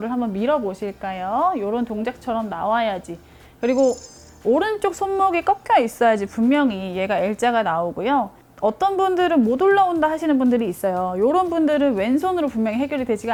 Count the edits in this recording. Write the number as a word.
zero